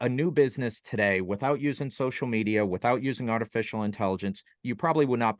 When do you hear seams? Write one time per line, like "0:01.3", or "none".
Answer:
none

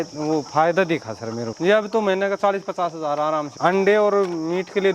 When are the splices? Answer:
0:01.5
0:03.5

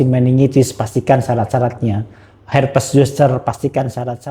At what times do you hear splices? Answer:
none

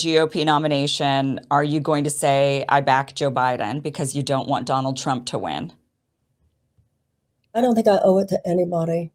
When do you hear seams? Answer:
none

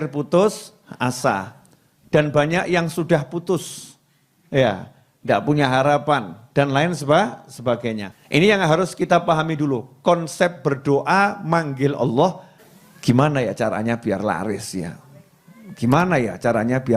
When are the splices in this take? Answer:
0:08.1
0:12.5

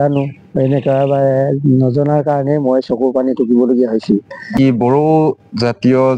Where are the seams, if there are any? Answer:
0:04.5

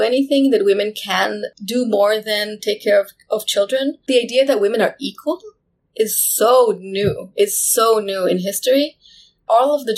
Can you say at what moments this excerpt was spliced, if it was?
0:04.1

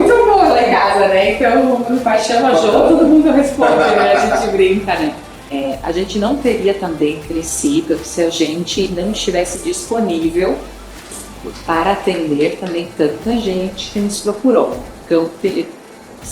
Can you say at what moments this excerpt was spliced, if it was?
0:05.5

